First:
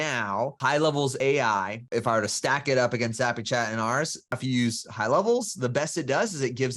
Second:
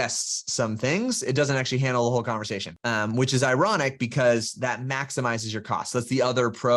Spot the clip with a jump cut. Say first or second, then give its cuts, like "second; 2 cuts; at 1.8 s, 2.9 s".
first; 2 cuts; at 1.8 s, 4.3 s